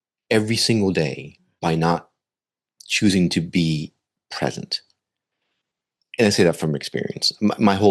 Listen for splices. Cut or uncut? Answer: uncut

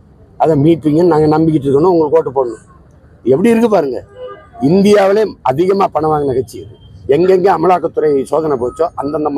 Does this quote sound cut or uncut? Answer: cut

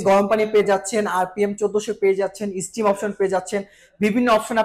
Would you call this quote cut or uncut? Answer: uncut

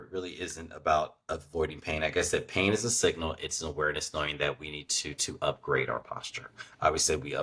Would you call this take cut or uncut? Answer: uncut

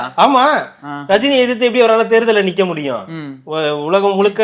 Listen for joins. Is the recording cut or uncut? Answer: uncut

